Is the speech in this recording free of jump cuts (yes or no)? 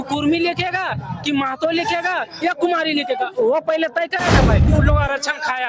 no